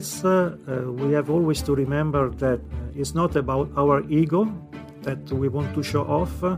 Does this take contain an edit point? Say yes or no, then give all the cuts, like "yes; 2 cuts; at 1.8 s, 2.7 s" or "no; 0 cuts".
yes; 1 cut; at 2.7 s